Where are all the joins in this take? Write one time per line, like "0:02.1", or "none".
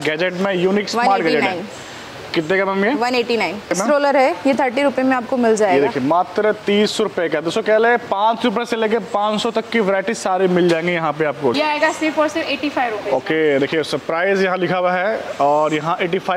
0:03.7
0:11.5